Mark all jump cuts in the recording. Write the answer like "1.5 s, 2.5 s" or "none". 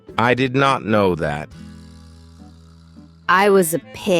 1.5 s, 3.2 s